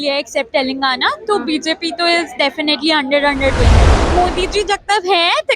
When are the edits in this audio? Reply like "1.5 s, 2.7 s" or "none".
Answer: 4.0 s